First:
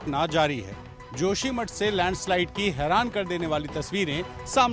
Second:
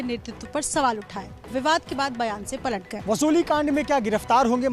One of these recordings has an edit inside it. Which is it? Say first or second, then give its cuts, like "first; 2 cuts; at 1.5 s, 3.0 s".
second; 1 cut; at 2.9 s